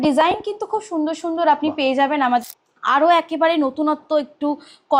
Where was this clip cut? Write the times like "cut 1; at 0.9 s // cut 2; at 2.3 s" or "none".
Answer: cut 1; at 2.4 s